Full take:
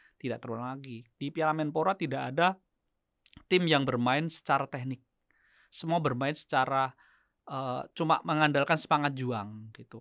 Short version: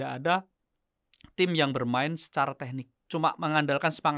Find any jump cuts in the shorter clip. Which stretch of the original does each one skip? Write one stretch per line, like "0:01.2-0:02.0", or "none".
0:05.1-0:07.9